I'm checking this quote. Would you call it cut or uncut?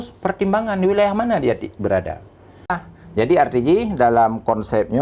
cut